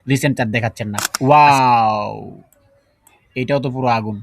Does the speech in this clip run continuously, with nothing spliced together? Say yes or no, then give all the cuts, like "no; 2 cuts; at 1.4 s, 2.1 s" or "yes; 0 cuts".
no; 1 cut; at 1.1 s